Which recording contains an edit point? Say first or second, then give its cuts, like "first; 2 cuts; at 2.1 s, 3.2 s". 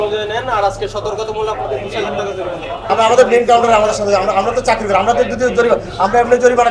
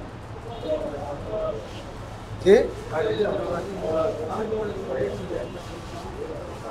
first; 1 cut; at 2.9 s